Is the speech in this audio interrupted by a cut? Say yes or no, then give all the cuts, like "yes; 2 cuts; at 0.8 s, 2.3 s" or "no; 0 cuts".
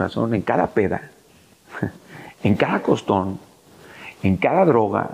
no; 0 cuts